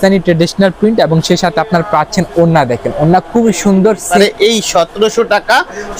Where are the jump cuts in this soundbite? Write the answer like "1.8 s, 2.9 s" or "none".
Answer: 4.1 s